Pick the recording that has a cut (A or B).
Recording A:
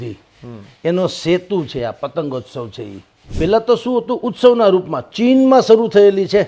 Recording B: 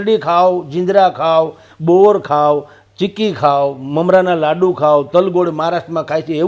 A